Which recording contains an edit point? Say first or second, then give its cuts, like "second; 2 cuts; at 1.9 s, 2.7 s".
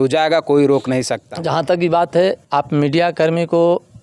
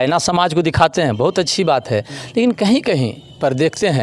first; 1 cut; at 1.2 s